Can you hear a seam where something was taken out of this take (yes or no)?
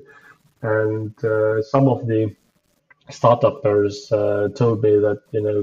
no